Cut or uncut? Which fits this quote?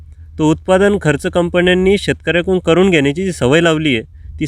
uncut